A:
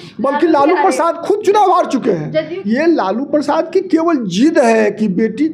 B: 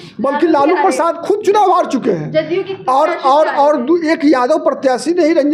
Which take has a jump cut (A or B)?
A